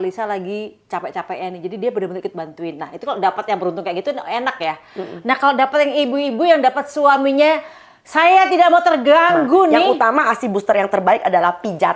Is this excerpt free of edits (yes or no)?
no